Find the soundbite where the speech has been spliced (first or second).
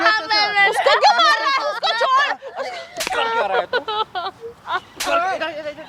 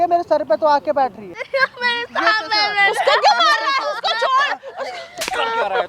second